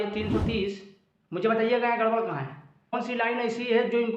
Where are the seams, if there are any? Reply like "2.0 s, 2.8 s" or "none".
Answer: 3.0 s